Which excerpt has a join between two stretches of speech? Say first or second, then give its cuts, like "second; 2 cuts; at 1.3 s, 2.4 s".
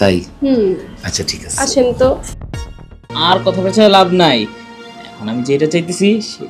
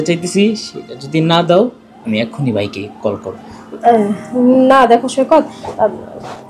first; 1 cut; at 3.0 s